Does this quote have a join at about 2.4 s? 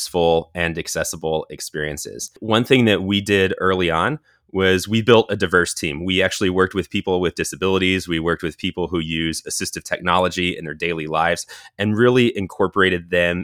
yes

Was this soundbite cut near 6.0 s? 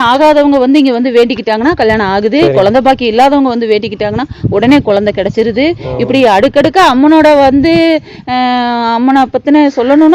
no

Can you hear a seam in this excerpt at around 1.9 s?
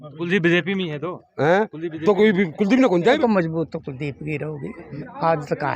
no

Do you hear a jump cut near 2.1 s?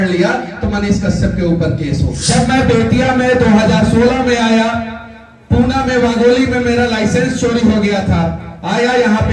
yes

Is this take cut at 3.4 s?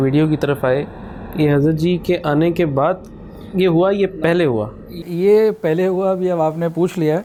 no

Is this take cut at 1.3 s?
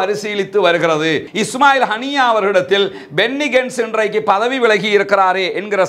yes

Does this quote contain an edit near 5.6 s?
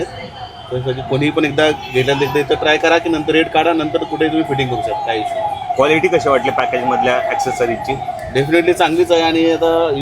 no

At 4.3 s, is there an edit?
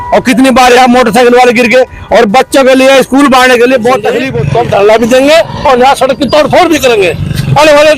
yes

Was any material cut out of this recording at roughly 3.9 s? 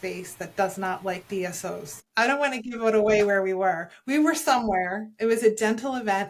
no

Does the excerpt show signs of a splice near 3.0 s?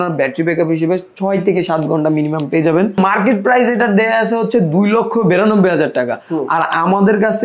yes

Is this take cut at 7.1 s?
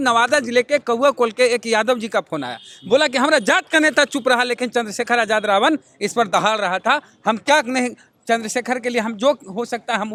no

